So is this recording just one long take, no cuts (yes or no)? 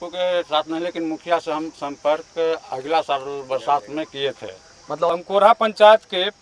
no